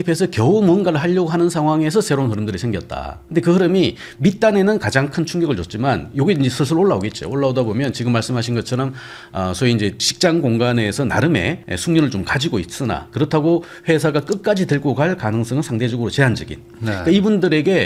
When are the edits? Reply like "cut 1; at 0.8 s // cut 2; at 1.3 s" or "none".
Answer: none